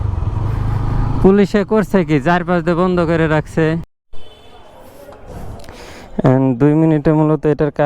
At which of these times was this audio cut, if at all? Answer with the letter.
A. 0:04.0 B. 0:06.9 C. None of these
A